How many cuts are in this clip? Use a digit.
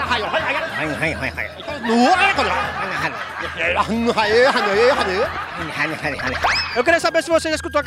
0